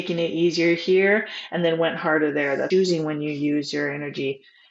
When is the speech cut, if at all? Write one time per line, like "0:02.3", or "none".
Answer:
0:02.7